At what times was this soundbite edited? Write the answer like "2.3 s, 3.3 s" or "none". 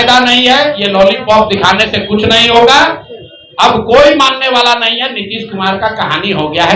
none